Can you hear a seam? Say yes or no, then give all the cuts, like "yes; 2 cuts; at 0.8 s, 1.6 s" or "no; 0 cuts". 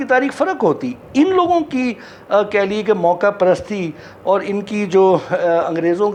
no; 0 cuts